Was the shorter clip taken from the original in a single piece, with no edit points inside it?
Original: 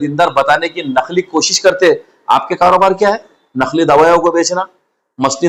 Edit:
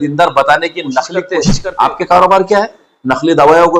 no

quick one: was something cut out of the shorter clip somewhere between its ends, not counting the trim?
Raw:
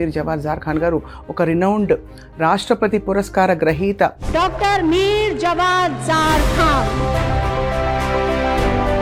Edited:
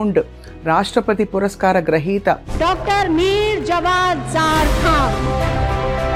no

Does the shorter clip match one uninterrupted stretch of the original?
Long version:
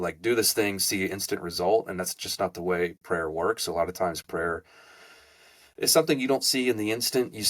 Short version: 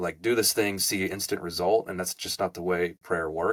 yes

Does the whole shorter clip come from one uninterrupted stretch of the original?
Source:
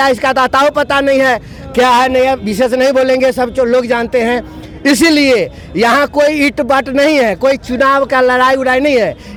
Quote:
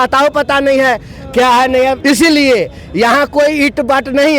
no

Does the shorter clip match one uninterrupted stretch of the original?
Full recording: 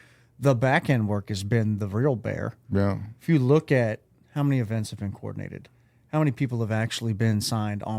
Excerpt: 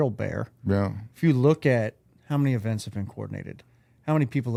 yes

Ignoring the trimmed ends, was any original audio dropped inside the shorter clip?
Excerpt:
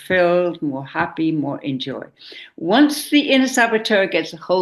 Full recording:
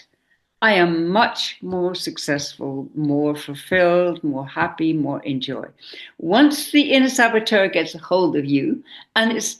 no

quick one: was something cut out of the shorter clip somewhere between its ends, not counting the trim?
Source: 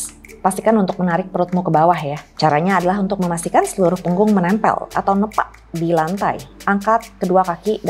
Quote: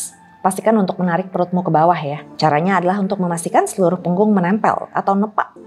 no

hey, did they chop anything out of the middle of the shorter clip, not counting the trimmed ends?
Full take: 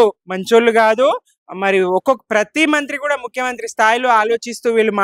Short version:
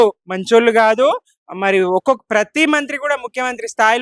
no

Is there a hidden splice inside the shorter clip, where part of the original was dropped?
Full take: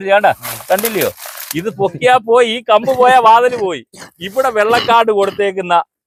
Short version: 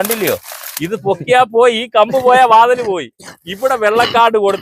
no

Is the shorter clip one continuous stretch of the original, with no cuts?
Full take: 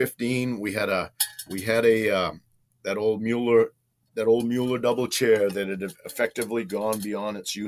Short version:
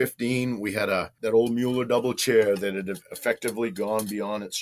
no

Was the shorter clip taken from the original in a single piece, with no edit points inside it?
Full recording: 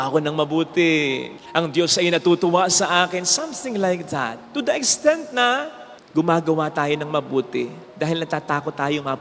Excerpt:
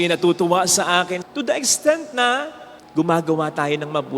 no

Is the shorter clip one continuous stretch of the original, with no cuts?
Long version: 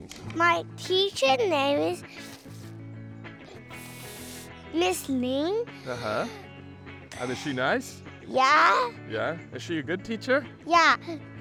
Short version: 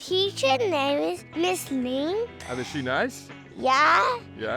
no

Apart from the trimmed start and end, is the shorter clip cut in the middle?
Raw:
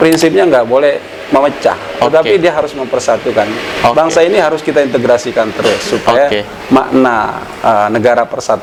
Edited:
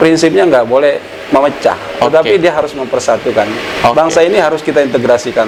no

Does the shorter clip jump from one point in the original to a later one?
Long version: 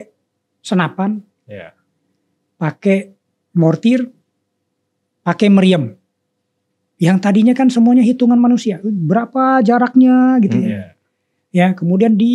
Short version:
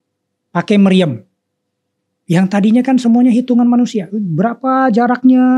no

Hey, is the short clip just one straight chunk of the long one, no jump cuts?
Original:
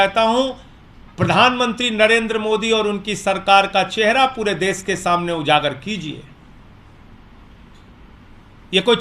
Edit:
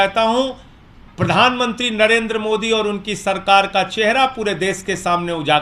yes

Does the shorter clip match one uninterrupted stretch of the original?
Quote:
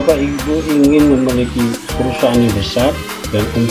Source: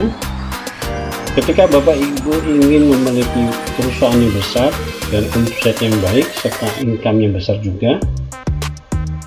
yes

